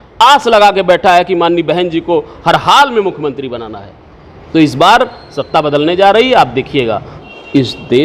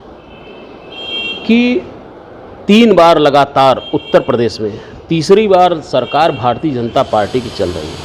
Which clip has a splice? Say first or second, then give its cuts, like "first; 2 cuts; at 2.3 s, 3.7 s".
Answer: first; 1 cut; at 7.1 s